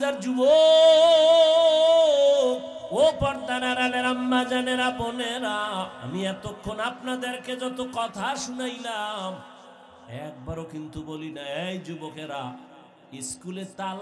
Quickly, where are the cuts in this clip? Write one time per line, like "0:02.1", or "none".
0:02.8
0:06.0